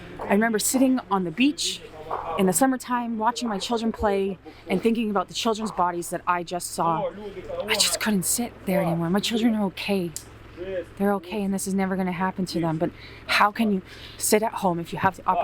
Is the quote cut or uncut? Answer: cut